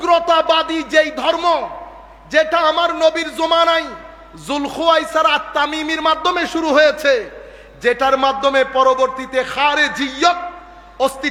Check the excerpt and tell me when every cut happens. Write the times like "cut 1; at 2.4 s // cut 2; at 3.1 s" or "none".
none